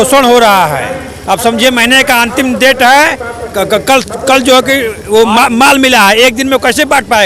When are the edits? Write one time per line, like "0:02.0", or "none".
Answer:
none